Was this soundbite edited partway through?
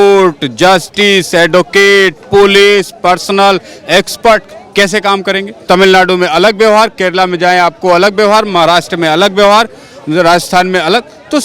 yes; 1 cut; at 5.6 s

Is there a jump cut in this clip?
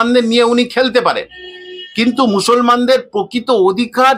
no; 0 cuts

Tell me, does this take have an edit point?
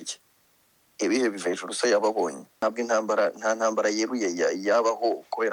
yes; 1 cut; at 2.5 s

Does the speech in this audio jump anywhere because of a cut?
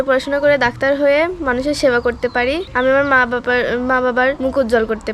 yes; 2 cuts; at 2.7 s, 4.4 s

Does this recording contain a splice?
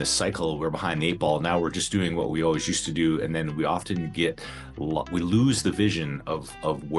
no; 0 cuts

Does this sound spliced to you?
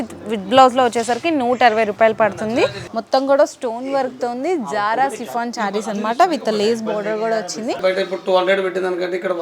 yes; 2 cuts; at 2.9 s, 7.8 s

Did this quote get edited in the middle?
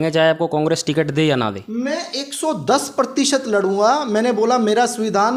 no; 0 cuts

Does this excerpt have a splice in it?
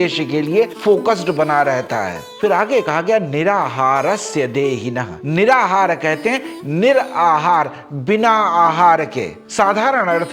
no; 0 cuts

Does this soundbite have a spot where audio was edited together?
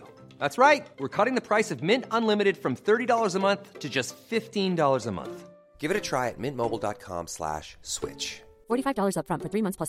no; 0 cuts

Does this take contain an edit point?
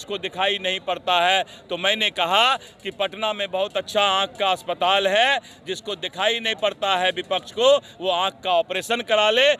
no; 0 cuts

